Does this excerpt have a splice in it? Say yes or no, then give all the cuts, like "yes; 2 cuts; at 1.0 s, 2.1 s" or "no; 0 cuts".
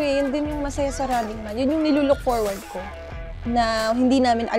no; 0 cuts